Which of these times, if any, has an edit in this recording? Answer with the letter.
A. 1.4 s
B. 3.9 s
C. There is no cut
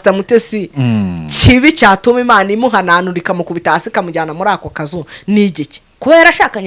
C